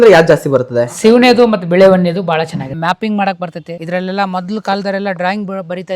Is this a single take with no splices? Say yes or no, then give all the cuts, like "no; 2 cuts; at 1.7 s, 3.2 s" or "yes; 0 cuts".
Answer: no; 2 cuts; at 2.7 s, 3.7 s